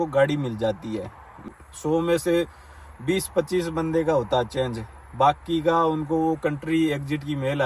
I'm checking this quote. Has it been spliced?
yes; 1 cut; at 1.5 s

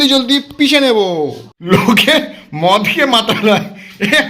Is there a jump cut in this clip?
yes; 1 cut; at 1.5 s

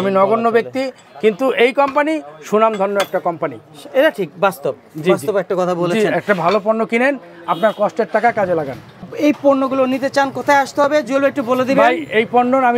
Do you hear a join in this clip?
no; 0 cuts

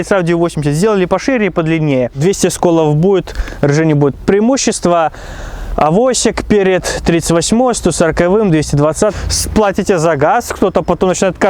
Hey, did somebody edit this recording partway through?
yes; 2 cuts; at 2.2 s, 9.2 s

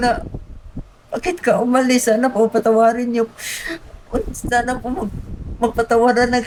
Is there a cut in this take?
no; 0 cuts

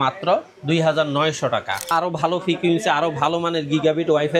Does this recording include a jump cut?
yes; 1 cut; at 1.9 s

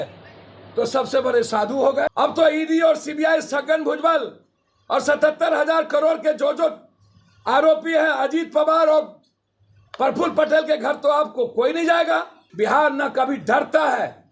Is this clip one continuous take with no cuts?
no; 2 cuts; at 2.1 s, 12.4 s

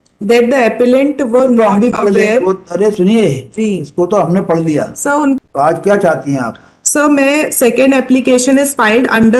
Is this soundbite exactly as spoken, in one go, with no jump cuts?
no; 1 cut; at 5.4 s

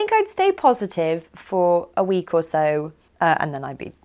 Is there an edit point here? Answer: yes; 1 cut; at 3.0 s

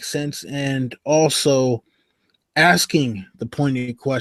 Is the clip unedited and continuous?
yes; 0 cuts

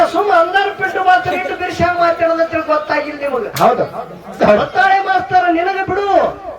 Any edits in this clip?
yes; 1 cut; at 4.4 s

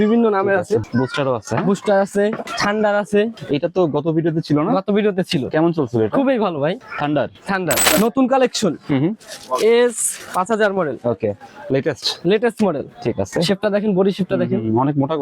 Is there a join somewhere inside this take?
yes; 6 cuts; at 0.9 s, 2.5 s, 3.3 s, 6.8 s, 7.8 s, 10.1 s

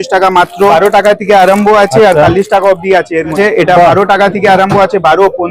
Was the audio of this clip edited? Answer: yes; 2 cuts; at 0.7 s, 3.3 s

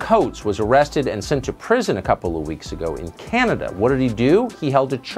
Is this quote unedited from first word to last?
yes; 0 cuts

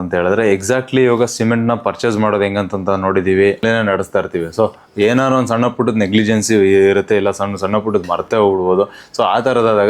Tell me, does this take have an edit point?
yes; 1 cut; at 3.6 s

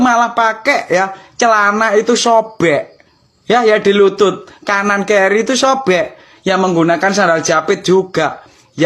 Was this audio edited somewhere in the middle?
no; 0 cuts

